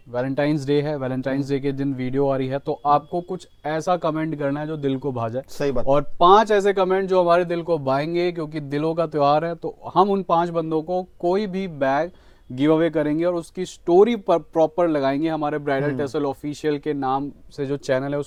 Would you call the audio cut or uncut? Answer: uncut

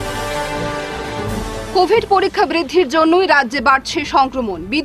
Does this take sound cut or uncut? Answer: cut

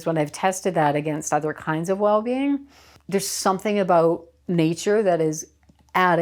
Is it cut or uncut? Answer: cut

